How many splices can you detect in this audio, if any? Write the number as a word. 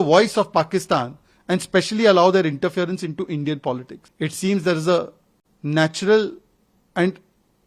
one